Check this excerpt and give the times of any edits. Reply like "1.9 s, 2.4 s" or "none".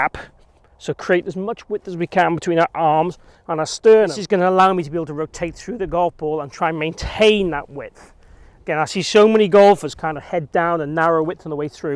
4.2 s